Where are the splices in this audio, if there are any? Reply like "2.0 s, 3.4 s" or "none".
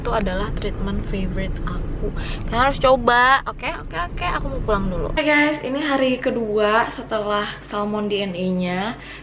5.2 s